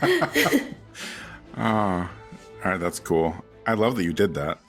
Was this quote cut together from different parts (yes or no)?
no